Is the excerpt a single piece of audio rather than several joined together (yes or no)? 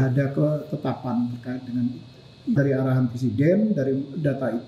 no